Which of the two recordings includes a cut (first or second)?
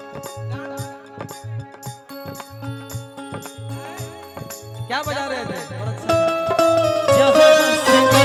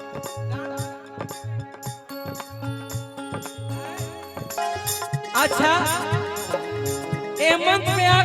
second